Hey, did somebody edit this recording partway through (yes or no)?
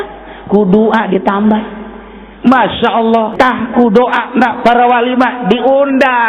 yes